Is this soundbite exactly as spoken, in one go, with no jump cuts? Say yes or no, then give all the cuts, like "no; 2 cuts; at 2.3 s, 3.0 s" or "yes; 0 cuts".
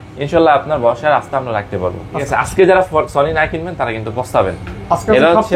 no; 1 cut; at 2.3 s